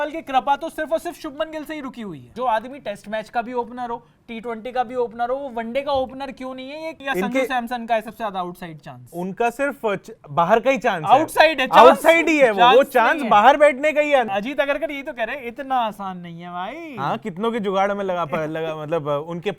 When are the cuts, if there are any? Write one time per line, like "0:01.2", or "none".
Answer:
0:02.3
0:07.0
0:14.3